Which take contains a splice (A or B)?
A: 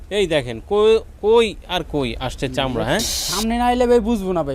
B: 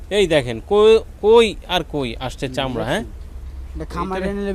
A